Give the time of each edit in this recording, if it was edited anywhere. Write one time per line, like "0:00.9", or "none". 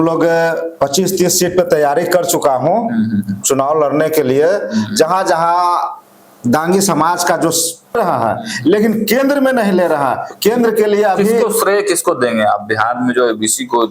0:08.0